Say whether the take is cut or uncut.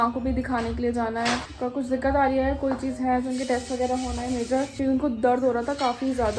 cut